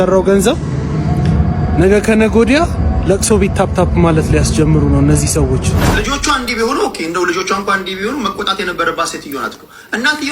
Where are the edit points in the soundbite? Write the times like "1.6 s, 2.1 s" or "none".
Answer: 5.9 s